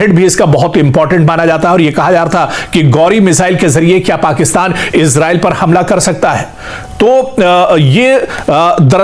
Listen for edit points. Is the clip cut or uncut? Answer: uncut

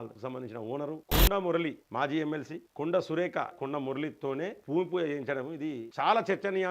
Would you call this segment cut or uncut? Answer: cut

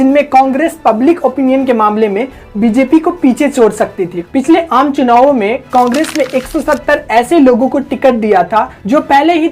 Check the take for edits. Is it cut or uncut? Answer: cut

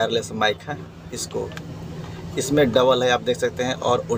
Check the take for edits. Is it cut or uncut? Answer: uncut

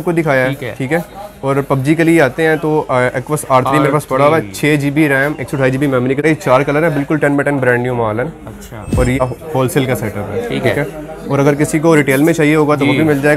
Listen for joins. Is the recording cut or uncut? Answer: cut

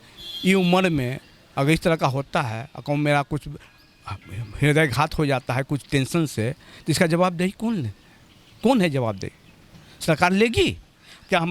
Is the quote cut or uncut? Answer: uncut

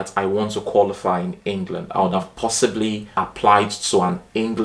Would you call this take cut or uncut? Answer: cut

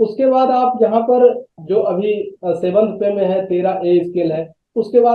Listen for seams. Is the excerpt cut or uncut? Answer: cut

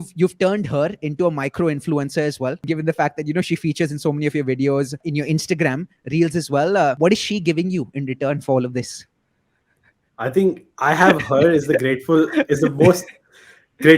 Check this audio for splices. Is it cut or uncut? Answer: cut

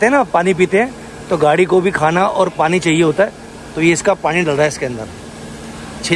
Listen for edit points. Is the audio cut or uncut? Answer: uncut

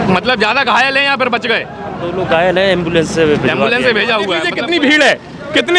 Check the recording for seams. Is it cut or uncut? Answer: cut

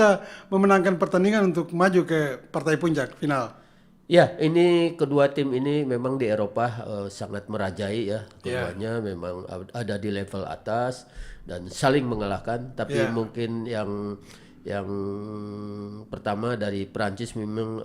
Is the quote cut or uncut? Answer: uncut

